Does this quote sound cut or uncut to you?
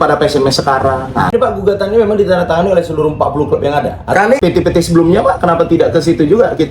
cut